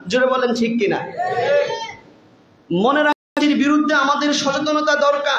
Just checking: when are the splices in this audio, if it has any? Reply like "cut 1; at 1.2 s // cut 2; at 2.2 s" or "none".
cut 1; at 3.2 s